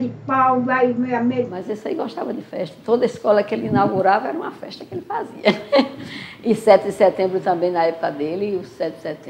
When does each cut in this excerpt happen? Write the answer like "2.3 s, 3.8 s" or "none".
1.6 s